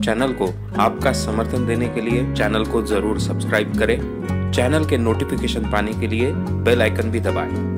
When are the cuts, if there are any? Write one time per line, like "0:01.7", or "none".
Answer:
none